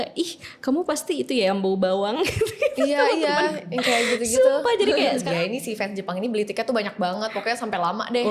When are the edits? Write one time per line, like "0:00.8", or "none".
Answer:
0:05.2